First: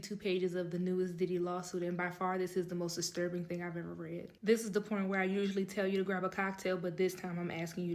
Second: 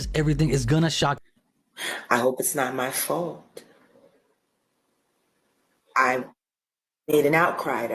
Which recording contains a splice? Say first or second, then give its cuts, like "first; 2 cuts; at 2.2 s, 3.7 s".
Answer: second; 1 cut; at 1.2 s